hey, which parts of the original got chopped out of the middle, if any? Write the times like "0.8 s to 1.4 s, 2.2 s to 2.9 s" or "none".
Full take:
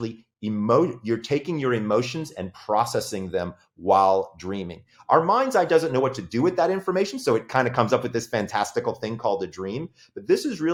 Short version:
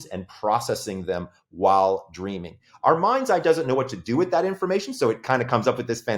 none